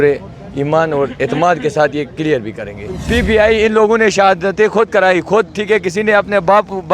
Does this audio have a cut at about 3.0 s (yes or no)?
yes